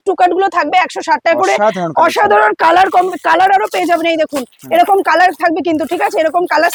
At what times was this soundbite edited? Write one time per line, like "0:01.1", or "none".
none